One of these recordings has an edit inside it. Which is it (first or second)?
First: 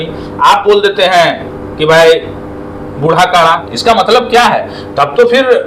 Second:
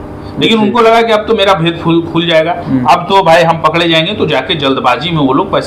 first